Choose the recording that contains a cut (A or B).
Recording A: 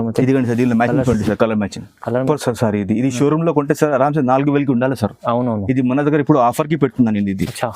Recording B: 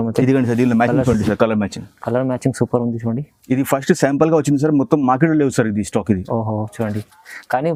A